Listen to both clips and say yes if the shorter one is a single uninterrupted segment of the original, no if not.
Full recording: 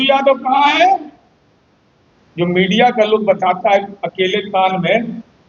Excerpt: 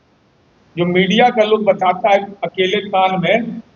yes